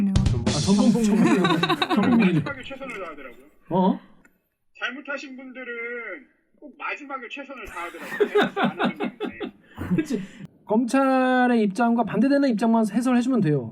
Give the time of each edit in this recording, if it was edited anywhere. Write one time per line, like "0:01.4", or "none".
0:10.3